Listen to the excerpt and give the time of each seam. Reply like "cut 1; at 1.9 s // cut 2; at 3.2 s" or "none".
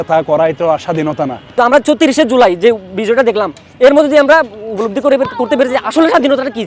cut 1; at 1.4 s